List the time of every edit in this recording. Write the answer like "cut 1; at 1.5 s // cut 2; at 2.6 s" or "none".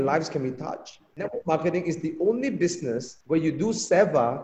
cut 1; at 1.2 s // cut 2; at 3.1 s

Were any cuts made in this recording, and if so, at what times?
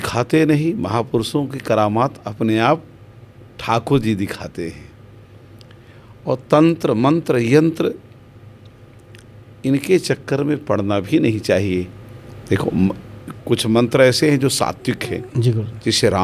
none

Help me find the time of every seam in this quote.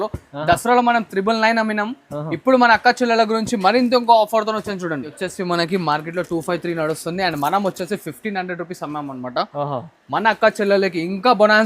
cut 1; at 5.2 s

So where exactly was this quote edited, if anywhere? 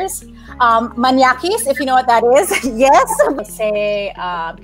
cut 1; at 3.4 s

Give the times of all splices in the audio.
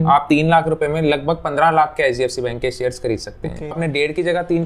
cut 1; at 3.8 s

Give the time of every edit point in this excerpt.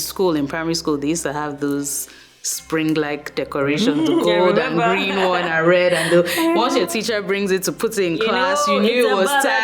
none

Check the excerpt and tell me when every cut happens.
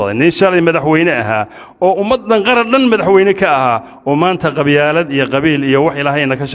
none

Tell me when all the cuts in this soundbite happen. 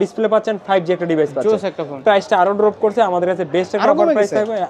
cut 1; at 2.0 s

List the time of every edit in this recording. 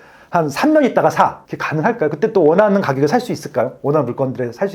cut 1; at 1.4 s

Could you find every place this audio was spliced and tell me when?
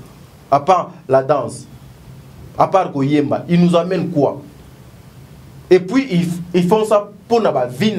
none

